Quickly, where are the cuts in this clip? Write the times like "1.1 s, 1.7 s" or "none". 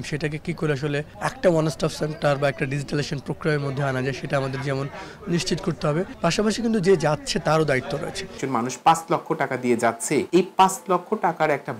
1.1 s, 6.1 s, 8.4 s, 10.3 s